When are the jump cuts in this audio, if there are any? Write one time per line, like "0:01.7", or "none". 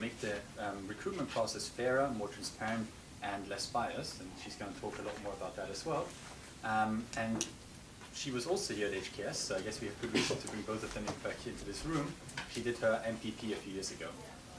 0:08.8